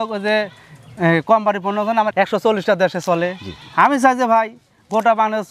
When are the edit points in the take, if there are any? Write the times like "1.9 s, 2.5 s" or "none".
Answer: 2.1 s